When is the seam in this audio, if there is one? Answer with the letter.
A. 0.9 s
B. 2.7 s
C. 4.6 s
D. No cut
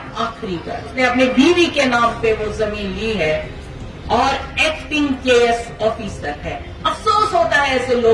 A